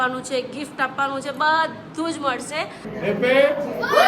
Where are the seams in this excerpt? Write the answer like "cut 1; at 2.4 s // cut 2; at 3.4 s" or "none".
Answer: cut 1; at 2.9 s